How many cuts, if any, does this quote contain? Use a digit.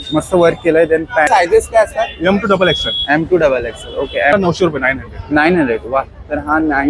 2